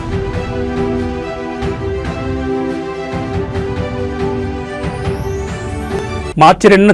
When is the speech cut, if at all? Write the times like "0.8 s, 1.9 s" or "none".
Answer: none